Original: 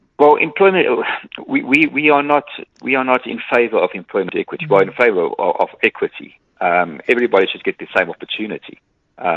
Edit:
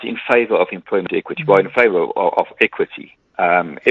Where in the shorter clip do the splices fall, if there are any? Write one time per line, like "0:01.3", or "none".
none